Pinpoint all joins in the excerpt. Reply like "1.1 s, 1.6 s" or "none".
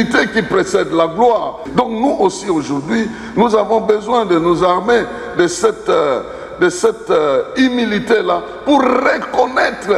1.7 s